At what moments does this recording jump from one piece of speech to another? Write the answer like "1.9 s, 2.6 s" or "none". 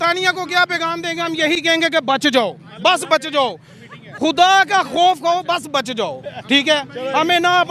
none

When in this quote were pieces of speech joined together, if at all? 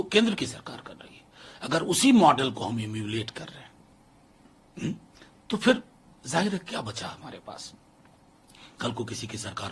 none

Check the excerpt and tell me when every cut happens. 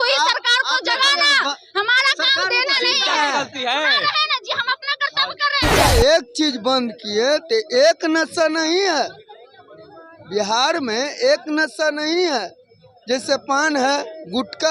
5.8 s

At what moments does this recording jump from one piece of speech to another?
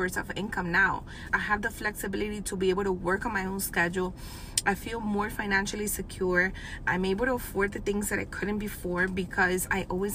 1.2 s

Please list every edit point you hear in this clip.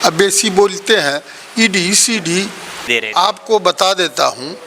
2.9 s

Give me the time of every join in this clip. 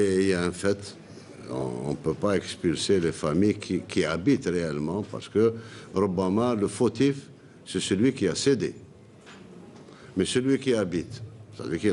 none

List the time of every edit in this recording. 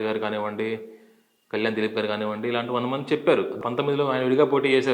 3.5 s

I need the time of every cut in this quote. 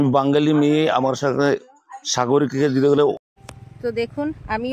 3.1 s

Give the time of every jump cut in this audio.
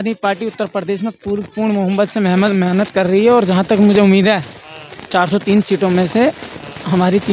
none

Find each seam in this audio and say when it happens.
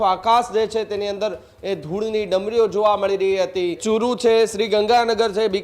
3.8 s

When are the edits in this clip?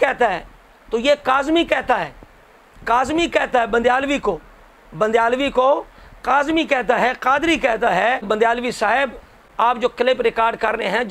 8.3 s, 9.8 s

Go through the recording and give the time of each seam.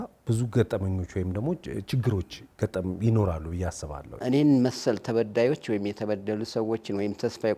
4.1 s

